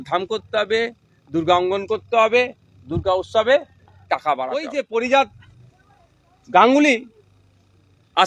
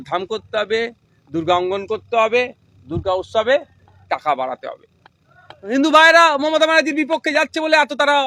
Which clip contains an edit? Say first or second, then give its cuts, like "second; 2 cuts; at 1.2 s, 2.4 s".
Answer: first; 1 cut; at 4.7 s